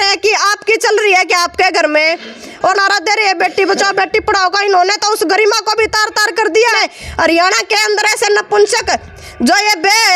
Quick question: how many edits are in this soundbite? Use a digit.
2